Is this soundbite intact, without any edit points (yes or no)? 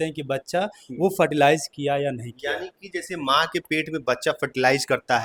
yes